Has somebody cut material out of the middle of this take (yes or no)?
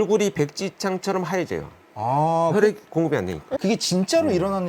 yes